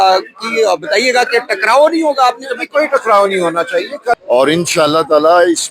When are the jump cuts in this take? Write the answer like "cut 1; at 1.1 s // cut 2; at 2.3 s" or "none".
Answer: cut 1; at 4.2 s